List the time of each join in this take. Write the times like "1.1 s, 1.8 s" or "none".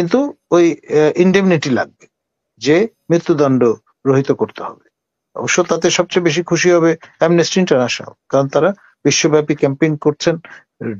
none